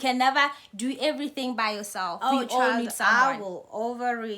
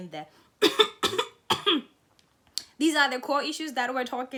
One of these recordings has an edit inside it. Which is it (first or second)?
first